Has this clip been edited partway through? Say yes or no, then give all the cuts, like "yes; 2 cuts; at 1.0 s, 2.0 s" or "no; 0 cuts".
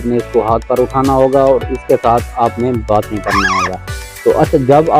no; 0 cuts